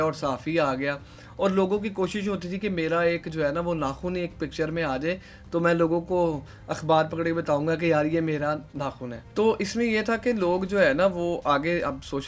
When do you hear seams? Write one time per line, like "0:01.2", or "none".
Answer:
none